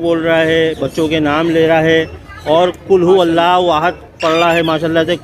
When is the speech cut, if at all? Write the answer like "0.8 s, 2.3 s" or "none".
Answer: none